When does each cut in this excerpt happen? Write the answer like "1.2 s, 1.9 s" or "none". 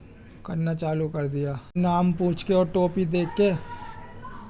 1.8 s